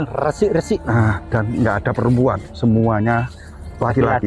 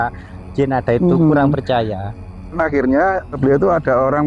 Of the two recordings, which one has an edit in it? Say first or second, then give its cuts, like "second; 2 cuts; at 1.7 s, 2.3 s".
second; 2 cuts; at 2.4 s, 3.4 s